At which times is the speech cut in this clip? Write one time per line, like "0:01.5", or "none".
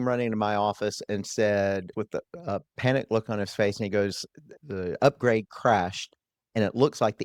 none